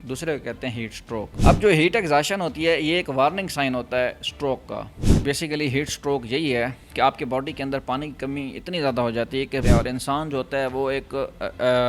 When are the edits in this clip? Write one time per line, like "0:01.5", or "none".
0:01.3
0:05.0
0:09.6